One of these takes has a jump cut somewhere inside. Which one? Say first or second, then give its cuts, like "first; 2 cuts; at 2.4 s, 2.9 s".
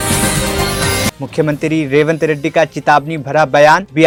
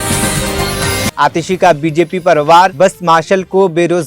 second; 1 cut; at 1.1 s